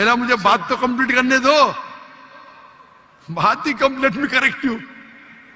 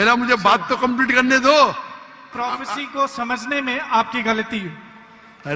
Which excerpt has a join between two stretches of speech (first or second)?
second